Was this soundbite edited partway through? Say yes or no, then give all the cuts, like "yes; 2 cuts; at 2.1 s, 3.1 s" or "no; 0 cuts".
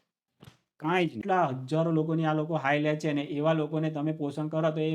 yes; 1 cut; at 1.2 s